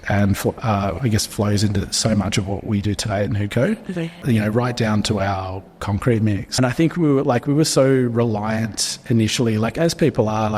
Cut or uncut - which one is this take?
cut